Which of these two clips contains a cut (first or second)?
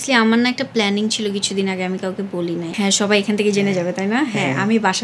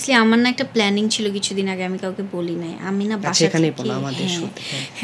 first